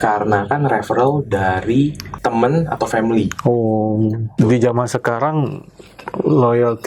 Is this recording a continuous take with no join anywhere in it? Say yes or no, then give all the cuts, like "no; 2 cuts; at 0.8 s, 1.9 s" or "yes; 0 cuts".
no; 2 cuts; at 2.1 s, 4.4 s